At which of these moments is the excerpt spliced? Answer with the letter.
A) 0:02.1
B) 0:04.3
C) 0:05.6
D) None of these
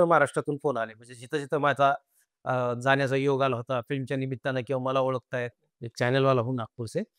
C